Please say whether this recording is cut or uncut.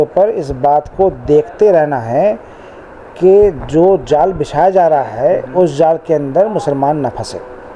uncut